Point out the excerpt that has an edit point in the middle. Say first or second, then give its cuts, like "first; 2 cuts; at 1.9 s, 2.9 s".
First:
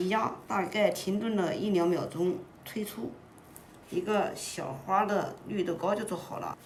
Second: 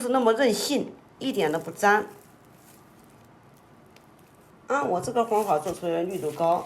second; 2 cuts; at 1.0 s, 4.5 s